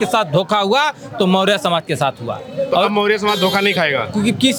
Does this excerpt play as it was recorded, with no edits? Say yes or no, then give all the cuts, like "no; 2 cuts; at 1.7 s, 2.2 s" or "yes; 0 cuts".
yes; 0 cuts